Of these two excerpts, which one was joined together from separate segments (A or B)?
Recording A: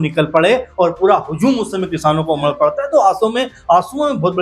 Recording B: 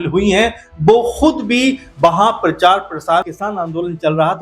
B